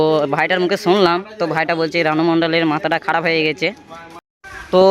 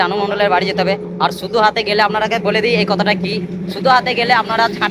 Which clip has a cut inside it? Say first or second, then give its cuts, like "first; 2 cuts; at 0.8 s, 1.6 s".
first; 1 cut; at 4.0 s